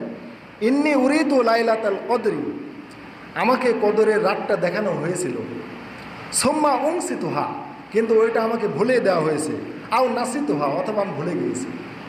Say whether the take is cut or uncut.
uncut